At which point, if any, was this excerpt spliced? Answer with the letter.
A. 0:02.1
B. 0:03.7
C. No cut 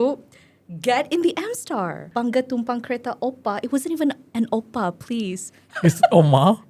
A